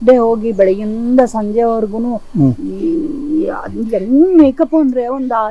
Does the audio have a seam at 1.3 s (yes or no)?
no